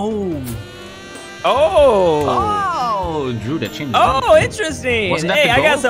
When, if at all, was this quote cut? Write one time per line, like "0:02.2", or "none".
none